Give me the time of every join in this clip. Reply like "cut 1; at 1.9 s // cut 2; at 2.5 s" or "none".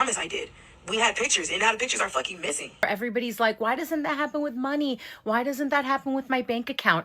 cut 1; at 2.8 s